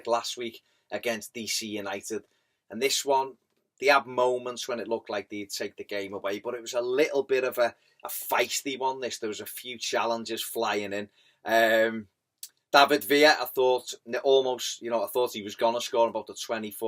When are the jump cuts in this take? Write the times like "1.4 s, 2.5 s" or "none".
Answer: 12.2 s

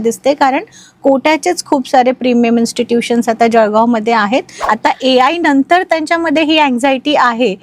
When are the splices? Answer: 4.6 s

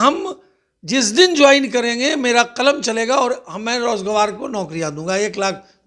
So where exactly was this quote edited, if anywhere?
none

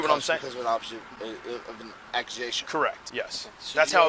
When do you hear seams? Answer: 3.0 s

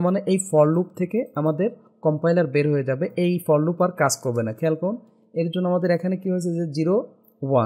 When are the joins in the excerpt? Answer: none

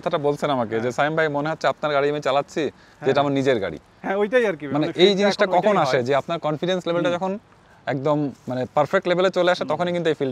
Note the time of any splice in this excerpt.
none

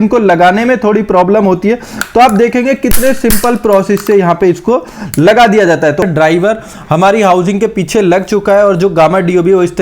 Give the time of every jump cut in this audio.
6.0 s

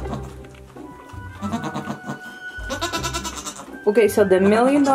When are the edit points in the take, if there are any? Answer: none

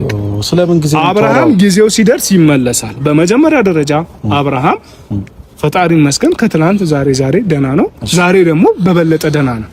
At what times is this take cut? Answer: none

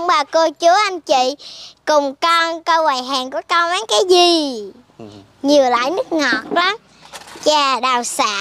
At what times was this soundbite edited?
none

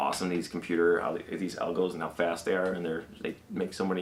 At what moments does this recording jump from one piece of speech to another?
none

